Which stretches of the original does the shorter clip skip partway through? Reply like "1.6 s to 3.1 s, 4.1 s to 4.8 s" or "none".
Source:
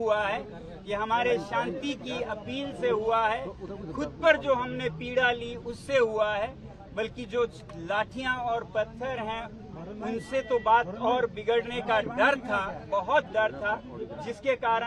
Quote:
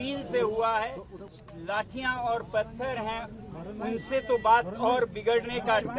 3.9 s to 7.6 s